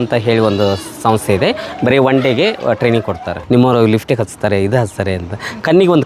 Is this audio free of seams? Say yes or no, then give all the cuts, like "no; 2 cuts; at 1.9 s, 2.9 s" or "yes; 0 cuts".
no; 1 cut; at 3.3 s